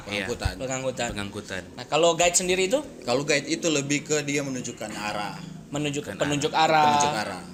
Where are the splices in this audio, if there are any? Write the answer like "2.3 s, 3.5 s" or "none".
none